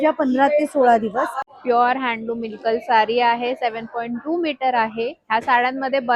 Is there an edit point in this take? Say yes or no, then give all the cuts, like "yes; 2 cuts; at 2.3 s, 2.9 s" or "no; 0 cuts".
yes; 1 cut; at 1.5 s